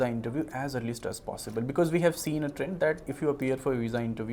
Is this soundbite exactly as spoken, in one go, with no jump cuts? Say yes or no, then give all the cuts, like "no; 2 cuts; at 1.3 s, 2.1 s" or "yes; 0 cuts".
yes; 0 cuts